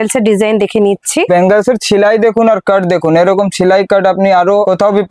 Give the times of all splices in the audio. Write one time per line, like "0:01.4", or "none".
none